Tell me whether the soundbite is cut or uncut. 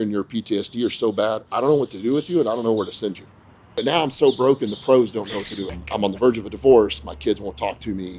cut